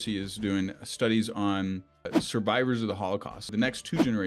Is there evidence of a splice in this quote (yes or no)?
yes